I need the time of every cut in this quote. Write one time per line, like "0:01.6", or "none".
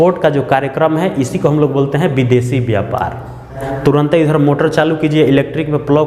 0:03.6

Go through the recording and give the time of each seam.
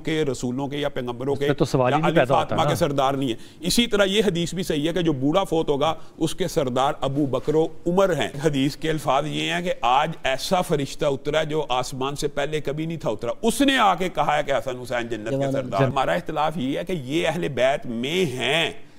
0:08.4
0:15.9

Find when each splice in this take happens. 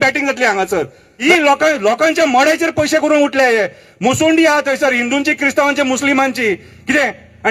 0:01.0

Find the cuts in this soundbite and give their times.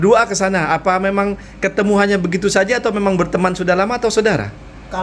none

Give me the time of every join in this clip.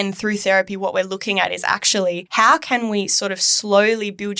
0:02.2

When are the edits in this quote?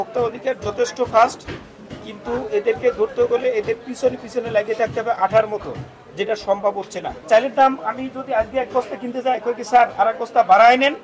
0:07.2

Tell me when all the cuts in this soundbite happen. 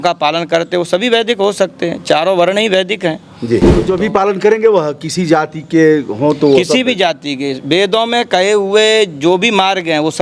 0:03.9

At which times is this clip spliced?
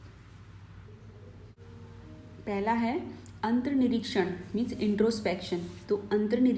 0:01.6

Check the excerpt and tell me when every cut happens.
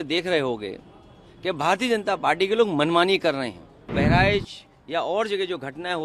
0:03.9

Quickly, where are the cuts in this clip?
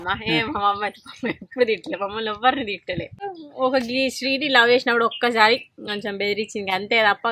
0:03.3

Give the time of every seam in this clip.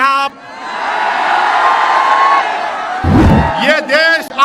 0:03.2

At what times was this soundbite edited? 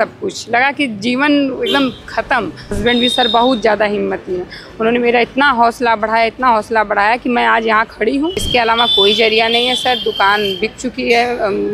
0:02.8
0:08.5

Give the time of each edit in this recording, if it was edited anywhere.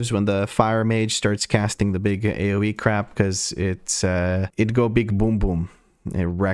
none

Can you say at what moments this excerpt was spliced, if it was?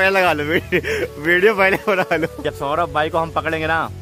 0:02.4

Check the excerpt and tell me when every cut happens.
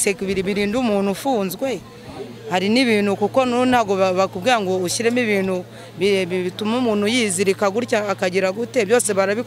none

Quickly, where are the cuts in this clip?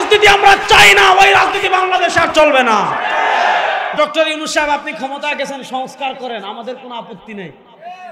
0:03.9

